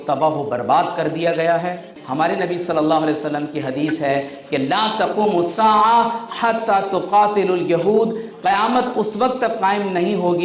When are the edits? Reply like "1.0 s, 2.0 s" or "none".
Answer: 2.0 s